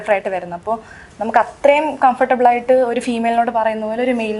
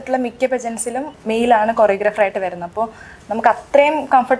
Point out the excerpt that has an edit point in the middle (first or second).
second